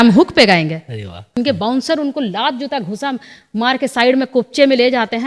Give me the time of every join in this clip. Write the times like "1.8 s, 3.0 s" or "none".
1.4 s